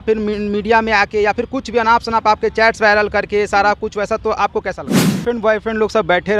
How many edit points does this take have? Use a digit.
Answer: 1